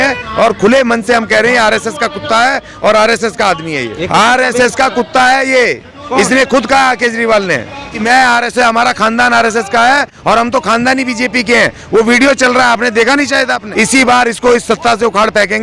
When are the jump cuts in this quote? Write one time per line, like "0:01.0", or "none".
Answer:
0:03.9
0:08.0
0:13.7